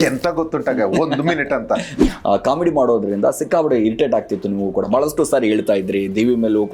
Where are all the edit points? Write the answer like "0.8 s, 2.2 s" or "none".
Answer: 2.0 s